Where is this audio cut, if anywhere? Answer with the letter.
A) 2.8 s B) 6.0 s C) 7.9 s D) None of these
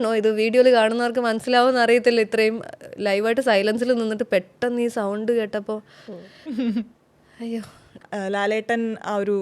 C